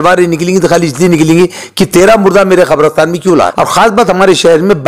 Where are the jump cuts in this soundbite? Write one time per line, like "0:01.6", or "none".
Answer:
0:03.5